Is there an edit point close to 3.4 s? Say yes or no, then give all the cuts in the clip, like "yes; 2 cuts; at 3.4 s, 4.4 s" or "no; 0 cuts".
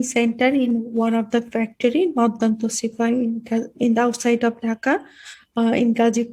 no; 0 cuts